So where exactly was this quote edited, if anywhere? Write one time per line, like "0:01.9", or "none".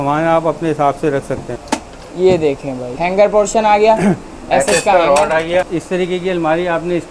0:01.5
0:02.9
0:05.7